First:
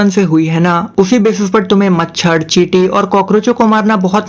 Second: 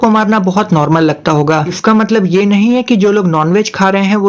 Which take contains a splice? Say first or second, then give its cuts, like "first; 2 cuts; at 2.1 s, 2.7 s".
second; 1 cut; at 1.7 s